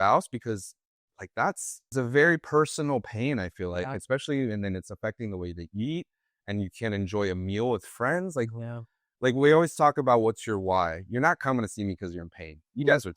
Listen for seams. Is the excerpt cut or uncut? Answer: cut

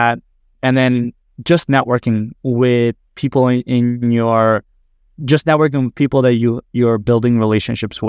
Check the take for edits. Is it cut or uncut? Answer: uncut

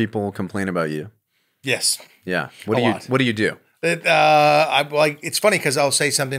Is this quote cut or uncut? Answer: uncut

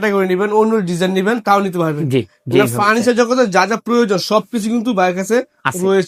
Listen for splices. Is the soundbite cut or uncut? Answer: uncut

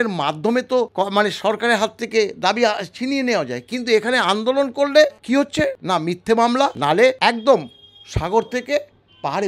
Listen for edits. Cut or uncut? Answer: cut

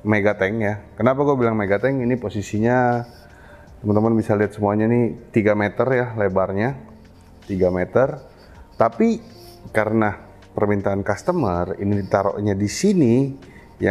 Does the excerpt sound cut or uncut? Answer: uncut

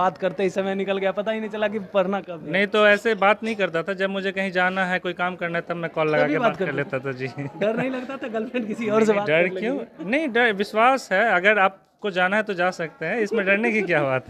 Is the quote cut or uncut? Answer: uncut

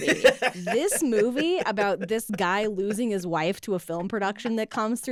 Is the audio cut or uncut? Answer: uncut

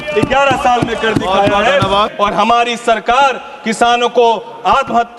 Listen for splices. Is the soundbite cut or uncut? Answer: cut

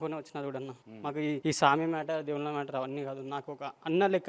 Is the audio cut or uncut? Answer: cut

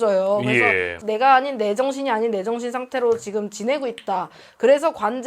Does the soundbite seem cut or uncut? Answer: cut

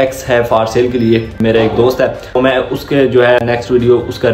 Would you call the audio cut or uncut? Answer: cut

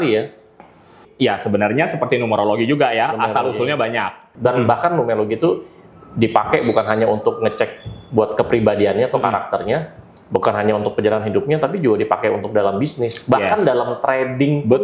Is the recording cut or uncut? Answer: cut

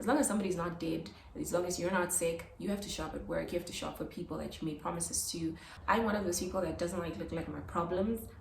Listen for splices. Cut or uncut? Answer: cut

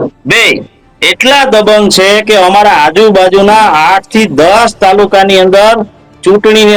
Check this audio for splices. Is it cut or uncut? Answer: uncut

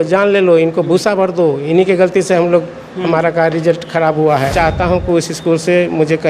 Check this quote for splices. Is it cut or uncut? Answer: cut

